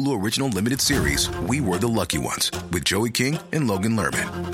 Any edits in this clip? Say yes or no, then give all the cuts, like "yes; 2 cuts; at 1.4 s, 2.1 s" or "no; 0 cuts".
no; 0 cuts